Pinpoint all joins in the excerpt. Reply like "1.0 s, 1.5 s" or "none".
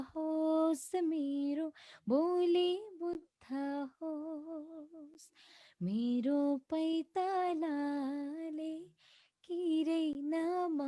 none